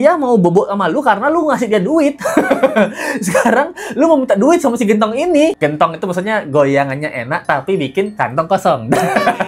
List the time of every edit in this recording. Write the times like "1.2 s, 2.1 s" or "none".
none